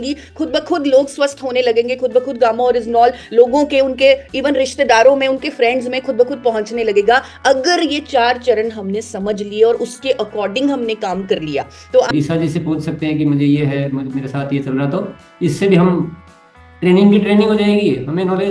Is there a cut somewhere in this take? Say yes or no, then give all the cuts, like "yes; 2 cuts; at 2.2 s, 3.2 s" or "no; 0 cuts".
yes; 1 cut; at 12.1 s